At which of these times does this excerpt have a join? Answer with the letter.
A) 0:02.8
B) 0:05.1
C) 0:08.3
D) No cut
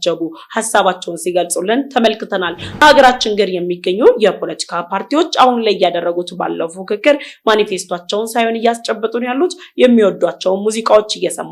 A